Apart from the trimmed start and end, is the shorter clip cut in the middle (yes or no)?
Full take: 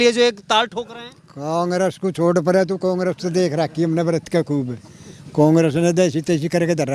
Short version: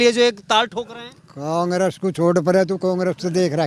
no